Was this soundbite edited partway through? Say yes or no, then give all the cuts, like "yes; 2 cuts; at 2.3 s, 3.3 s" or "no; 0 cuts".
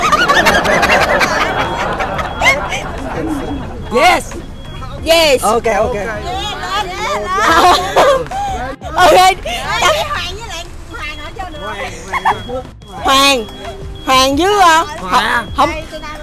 no; 0 cuts